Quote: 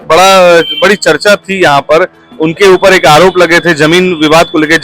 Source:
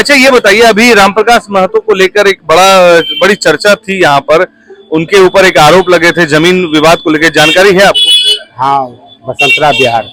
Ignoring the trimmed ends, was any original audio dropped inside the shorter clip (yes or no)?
yes